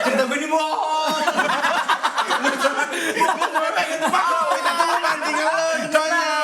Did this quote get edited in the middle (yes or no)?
no